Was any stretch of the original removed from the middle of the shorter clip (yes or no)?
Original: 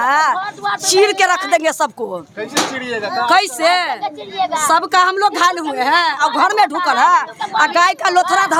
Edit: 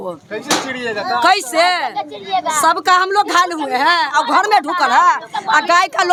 no